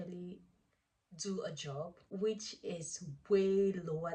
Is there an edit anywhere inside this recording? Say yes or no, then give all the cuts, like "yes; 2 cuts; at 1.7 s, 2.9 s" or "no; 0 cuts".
yes; 1 cut; at 2.0 s